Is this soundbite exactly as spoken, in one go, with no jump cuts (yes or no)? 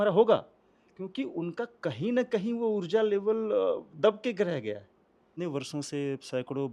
no